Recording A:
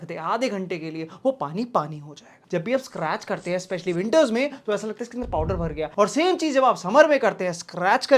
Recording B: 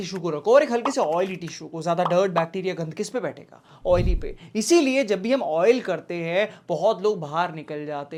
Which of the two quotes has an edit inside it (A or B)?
A